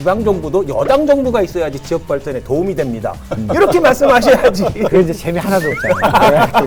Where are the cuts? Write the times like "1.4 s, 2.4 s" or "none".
none